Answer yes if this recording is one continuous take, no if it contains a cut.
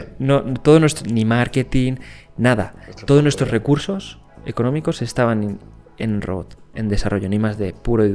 yes